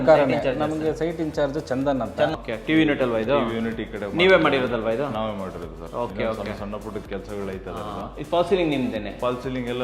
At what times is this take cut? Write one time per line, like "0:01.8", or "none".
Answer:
0:02.3